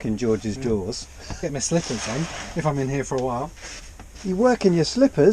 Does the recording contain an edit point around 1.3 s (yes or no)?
yes